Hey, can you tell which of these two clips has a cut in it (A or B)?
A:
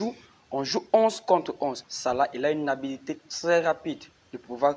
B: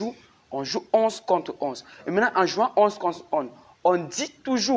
A